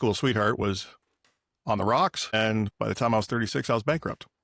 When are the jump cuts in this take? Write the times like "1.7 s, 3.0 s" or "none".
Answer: 2.2 s